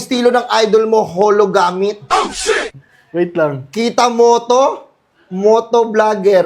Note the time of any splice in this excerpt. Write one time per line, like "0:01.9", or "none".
none